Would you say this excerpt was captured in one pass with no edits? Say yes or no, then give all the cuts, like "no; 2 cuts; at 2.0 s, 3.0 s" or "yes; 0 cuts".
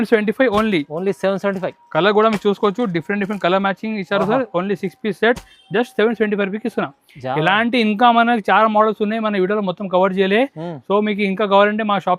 yes; 0 cuts